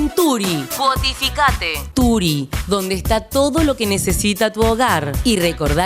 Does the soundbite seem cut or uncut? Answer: cut